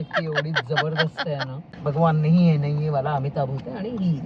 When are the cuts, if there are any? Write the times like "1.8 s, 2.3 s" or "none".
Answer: 1.7 s